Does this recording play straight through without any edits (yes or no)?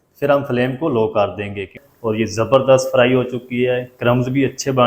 no